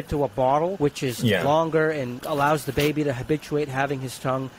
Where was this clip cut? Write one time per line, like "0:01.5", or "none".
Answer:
0:00.7
0:02.2